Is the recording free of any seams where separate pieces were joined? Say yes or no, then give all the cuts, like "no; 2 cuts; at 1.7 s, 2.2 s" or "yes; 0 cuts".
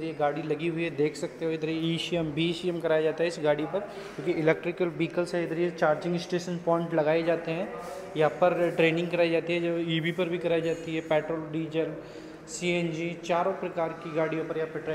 yes; 0 cuts